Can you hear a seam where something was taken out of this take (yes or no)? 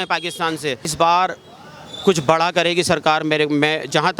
yes